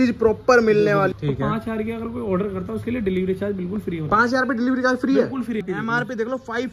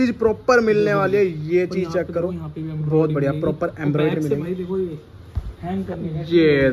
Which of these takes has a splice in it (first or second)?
first